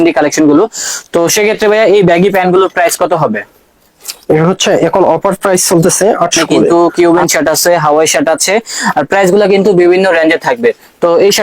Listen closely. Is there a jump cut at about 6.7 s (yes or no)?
yes